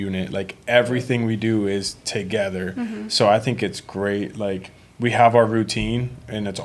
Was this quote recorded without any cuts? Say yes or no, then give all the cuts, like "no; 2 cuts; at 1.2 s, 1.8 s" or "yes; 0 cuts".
yes; 0 cuts